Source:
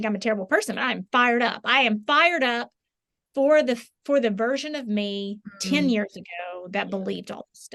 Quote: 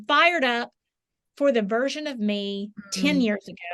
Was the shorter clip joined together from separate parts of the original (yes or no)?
yes